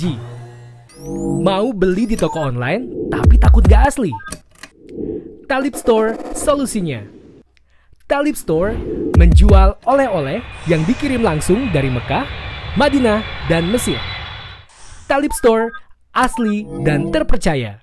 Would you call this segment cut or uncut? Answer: uncut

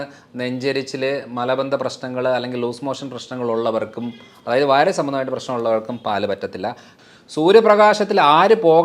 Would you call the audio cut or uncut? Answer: cut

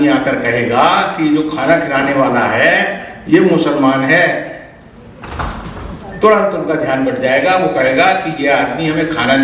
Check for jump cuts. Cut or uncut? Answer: uncut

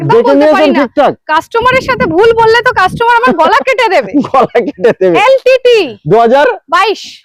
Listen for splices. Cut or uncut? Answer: uncut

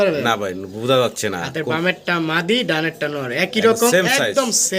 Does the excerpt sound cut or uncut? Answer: uncut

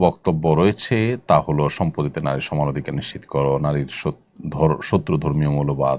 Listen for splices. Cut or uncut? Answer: uncut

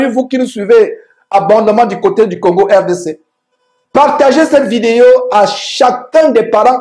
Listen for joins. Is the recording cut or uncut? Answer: uncut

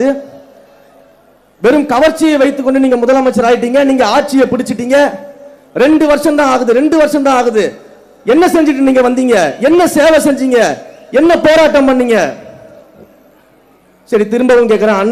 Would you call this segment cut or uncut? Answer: uncut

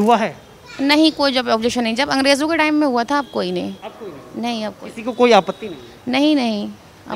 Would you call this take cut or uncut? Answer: uncut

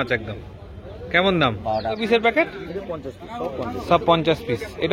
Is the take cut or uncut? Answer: cut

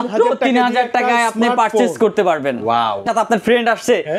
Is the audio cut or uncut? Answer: cut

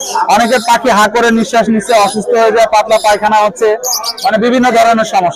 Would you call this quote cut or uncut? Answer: uncut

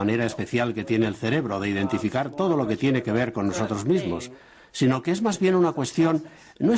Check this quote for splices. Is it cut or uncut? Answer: cut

